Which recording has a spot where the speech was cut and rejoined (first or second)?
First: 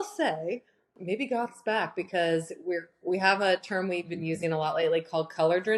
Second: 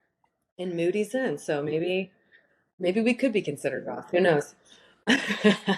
first